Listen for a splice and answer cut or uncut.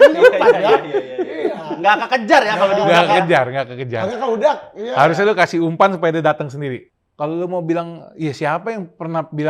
cut